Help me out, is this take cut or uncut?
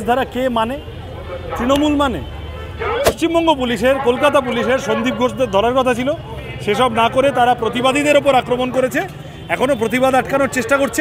cut